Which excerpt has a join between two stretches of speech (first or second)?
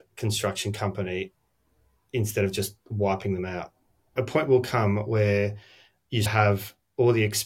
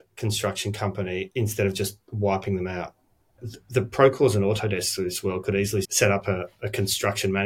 second